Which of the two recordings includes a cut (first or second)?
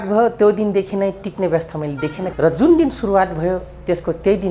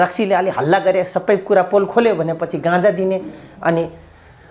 first